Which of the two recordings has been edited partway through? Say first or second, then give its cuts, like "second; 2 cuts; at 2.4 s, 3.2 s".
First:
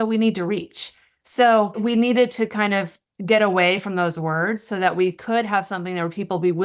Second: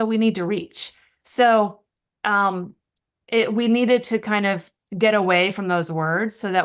first; 1 cut; at 1.8 s